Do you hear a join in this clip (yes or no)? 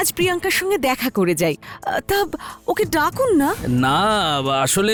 no